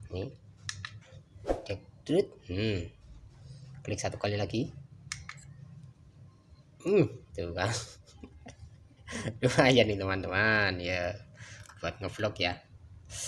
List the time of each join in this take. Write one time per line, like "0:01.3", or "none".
none